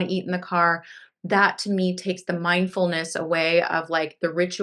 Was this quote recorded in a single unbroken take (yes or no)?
yes